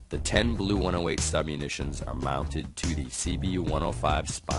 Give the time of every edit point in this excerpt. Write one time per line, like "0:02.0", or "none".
0:01.2

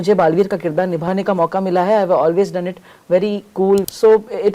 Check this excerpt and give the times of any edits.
0:01.1
0:03.8

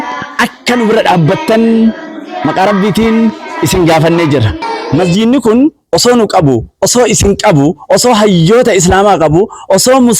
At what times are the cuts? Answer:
0:04.7

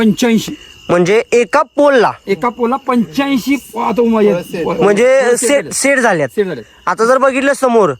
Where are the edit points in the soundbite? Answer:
none

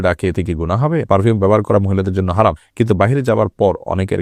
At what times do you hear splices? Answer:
0:01.1
0:02.6

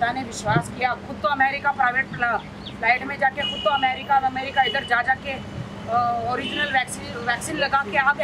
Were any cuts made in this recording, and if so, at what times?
none

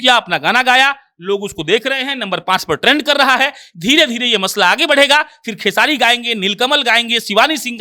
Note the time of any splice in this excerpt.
none

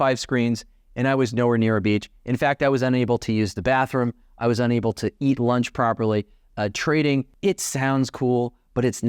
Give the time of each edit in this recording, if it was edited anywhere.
0:07.3

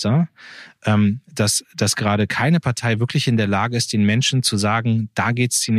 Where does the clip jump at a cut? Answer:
none

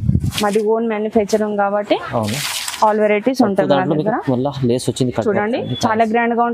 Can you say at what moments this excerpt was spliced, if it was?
none

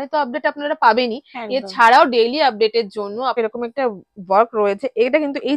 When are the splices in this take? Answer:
0:03.4

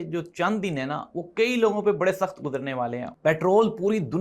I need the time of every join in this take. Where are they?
0:03.0

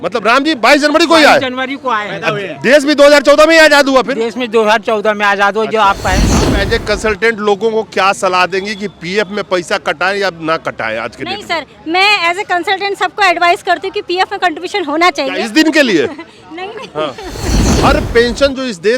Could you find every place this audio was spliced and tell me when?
0:06.2
0:17.6

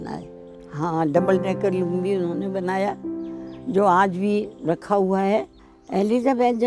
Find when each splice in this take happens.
0:05.6

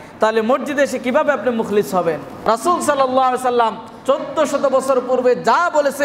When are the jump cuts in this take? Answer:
0:02.3

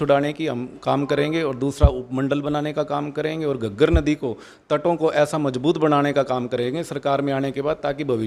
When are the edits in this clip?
none

